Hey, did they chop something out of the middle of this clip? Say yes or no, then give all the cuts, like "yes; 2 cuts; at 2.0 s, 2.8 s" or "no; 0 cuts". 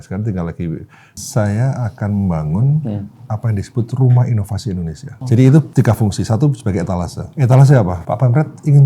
yes; 5 cuts; at 1.2 s, 5.1 s, 5.7 s, 7.2 s, 8.0 s